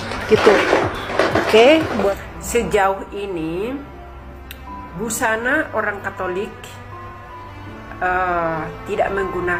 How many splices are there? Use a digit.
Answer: 0